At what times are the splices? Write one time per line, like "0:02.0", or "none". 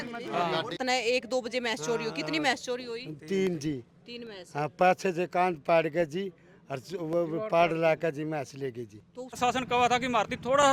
0:00.8
0:09.4